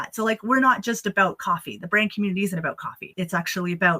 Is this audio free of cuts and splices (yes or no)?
no